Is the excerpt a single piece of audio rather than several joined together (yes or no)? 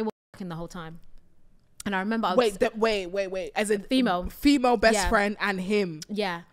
yes